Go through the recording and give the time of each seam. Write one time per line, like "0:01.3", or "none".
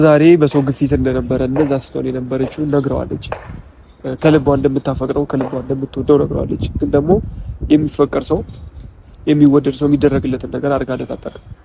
none